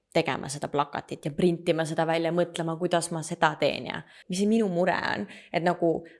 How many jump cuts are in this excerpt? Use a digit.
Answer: 1